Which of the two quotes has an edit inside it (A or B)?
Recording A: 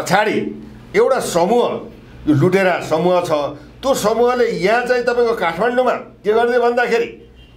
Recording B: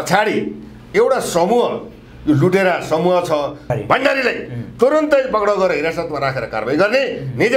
B